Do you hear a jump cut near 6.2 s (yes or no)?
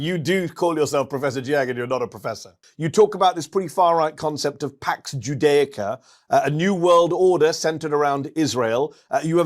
no